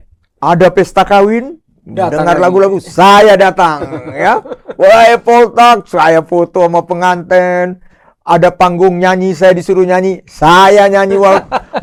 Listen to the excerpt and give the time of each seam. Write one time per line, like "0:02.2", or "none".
none